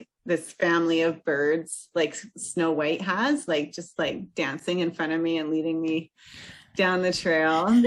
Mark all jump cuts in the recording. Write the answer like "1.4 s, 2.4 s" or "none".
none